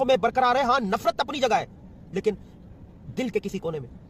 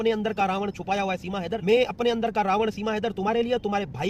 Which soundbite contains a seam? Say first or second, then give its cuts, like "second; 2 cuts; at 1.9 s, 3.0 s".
second; 1 cut; at 1.6 s